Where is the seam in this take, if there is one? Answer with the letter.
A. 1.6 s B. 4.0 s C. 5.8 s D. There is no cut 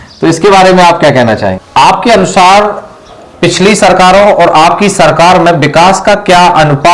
A